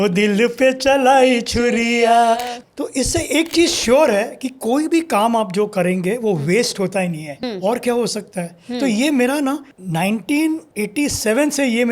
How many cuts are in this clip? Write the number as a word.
four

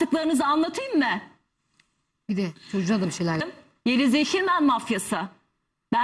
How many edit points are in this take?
one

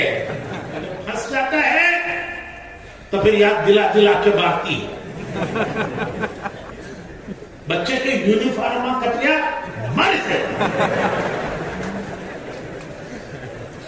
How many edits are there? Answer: one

